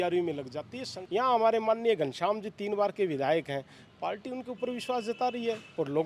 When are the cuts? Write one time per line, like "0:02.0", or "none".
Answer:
0:01.0